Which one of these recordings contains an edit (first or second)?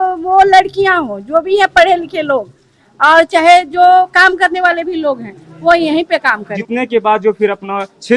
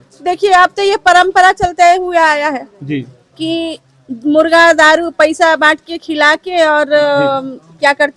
first